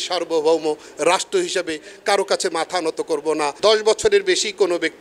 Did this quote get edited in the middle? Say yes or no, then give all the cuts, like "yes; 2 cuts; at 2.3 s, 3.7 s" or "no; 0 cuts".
yes; 1 cut; at 3.6 s